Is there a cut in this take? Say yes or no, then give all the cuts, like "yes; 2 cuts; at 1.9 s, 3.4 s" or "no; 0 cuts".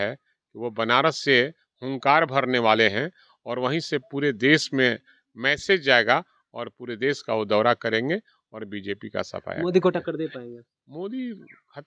no; 0 cuts